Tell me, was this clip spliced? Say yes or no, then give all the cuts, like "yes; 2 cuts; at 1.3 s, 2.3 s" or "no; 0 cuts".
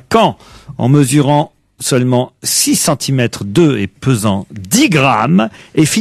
yes; 1 cut; at 4.3 s